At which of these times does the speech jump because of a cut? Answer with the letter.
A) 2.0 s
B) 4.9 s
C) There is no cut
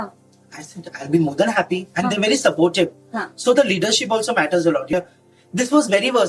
B